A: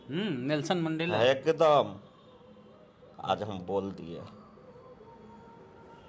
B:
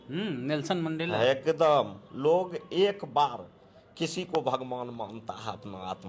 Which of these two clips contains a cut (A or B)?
B